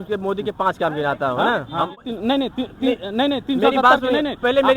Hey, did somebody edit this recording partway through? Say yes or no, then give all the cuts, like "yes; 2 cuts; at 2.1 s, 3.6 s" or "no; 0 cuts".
yes; 1 cut; at 2.1 s